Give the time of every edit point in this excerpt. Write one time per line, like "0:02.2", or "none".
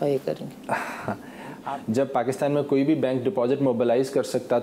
0:01.7